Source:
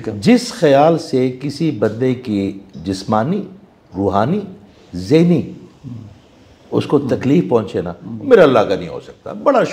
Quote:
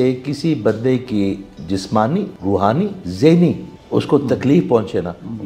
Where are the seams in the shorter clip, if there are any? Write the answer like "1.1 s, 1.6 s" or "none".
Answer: 2.7 s, 3.7 s